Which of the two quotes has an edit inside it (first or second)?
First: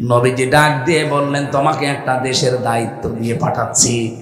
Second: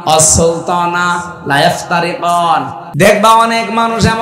second